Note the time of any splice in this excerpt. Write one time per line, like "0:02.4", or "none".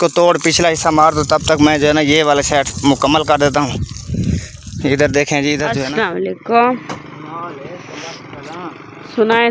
0:06.4

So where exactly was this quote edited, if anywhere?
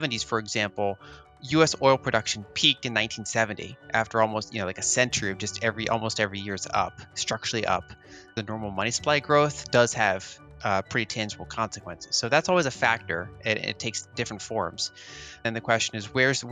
0:08.3
0:15.4

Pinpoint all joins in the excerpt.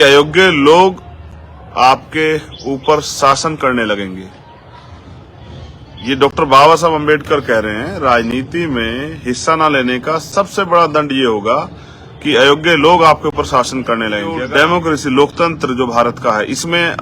0:14.4

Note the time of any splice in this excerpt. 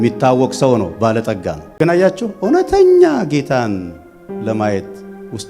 0:01.6

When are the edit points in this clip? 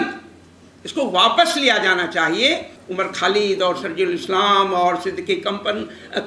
0:02.8

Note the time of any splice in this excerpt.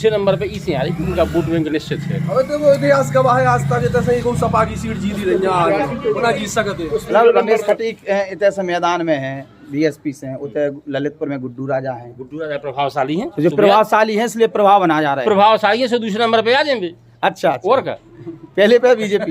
0:07.1

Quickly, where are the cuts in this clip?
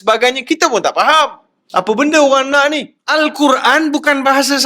0:03.0

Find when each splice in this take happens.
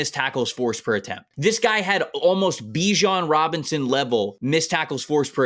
0:01.3
0:04.4

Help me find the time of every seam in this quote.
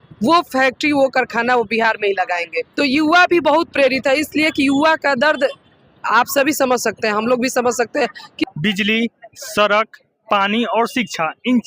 0:02.6
0:08.4

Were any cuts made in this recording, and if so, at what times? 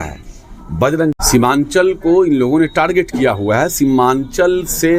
0:01.1

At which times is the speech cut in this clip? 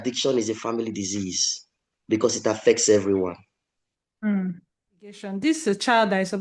0:05.3

